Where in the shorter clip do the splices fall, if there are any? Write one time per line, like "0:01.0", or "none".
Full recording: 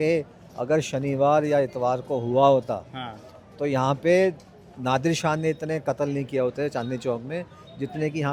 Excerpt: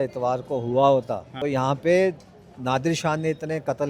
0:01.2